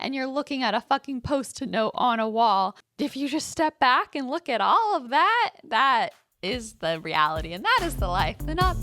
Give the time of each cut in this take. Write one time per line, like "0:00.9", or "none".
0:02.8